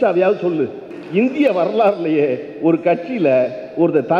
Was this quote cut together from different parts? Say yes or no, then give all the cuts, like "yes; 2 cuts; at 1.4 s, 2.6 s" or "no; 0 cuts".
yes; 1 cut; at 1.0 s